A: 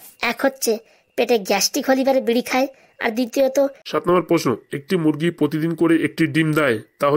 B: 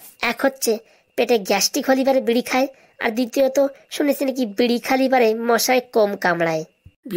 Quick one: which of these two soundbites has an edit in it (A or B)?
A